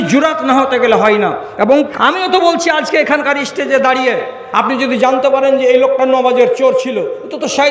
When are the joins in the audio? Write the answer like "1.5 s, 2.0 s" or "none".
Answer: 1.9 s